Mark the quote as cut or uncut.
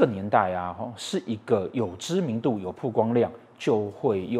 uncut